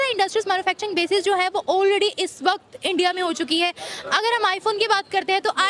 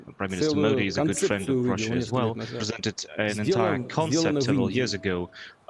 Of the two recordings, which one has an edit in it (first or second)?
second